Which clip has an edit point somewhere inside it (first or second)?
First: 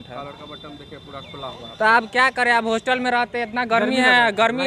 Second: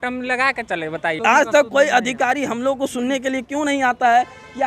second